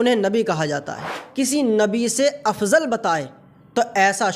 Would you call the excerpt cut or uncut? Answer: cut